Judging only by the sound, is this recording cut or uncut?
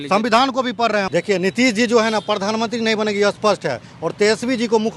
cut